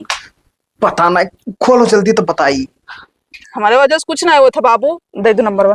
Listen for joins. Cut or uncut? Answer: cut